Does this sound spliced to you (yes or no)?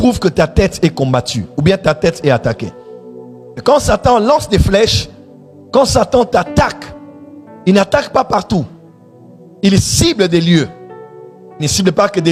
no